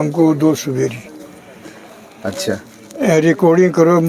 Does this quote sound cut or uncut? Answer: uncut